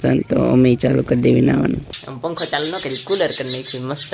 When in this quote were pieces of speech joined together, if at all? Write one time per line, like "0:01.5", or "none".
0:01.9